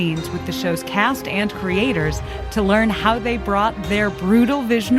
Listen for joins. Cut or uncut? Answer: uncut